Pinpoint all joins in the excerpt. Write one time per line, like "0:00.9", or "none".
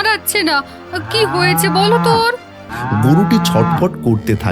0:02.7